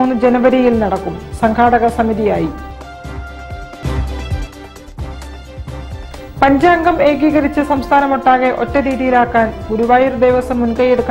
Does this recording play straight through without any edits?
yes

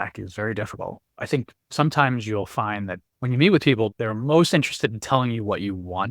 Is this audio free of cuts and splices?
no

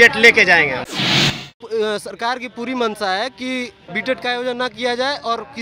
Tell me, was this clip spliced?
yes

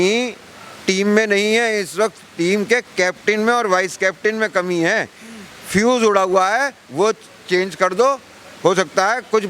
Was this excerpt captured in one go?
yes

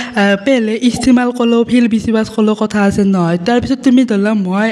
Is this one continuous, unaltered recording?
yes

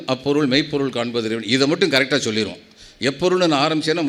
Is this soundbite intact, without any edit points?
yes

